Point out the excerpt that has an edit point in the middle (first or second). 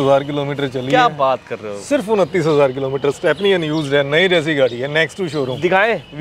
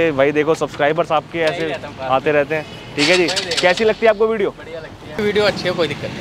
second